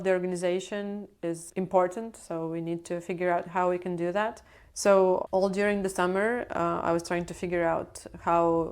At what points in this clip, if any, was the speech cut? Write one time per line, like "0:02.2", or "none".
0:01.1